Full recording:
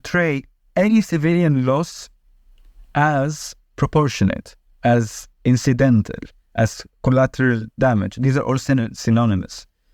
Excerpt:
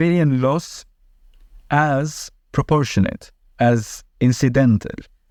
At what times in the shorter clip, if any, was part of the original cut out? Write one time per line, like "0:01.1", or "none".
none